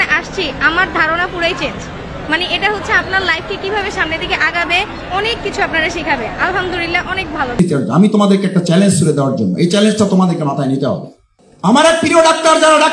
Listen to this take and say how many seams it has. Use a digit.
1